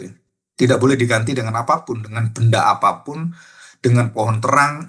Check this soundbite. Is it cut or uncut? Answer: uncut